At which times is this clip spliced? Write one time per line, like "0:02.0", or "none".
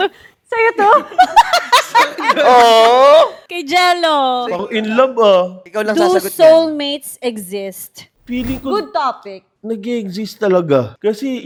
none